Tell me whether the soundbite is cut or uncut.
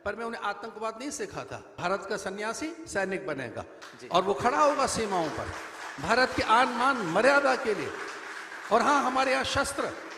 cut